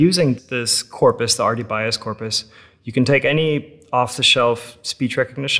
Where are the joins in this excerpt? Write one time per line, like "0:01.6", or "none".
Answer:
none

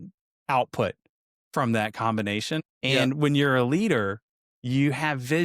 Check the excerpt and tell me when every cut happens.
0:02.7

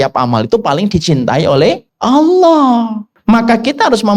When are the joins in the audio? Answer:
0:01.9
0:03.1

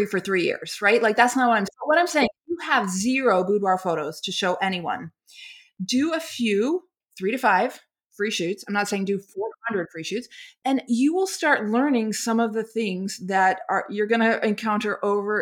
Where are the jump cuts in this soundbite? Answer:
0:01.6
0:07.0

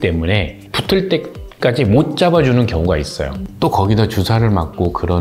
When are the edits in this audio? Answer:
0:03.4

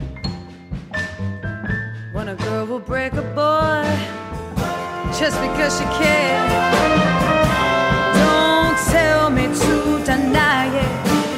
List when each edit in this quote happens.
none

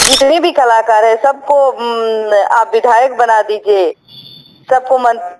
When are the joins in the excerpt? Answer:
none

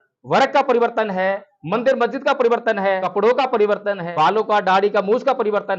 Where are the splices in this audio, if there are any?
0:03.0
0:04.0

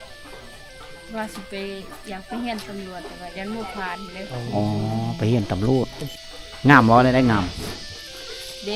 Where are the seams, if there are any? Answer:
0:06.0

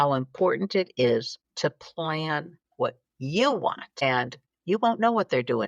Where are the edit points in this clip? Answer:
0:01.4
0:02.6
0:04.1

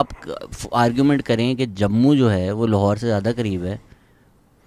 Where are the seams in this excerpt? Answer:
none

